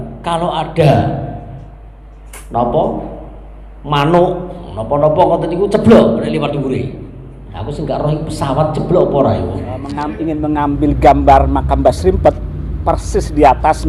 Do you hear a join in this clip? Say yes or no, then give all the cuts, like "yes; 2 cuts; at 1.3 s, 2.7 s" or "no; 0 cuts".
yes; 1 cut; at 9.9 s